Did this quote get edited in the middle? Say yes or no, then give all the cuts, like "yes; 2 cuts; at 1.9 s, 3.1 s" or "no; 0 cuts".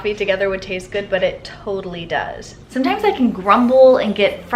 yes; 1 cut; at 2.5 s